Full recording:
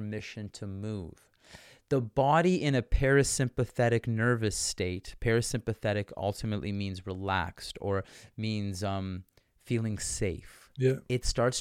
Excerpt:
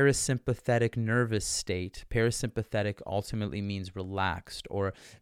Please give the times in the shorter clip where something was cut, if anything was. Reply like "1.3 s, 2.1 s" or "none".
none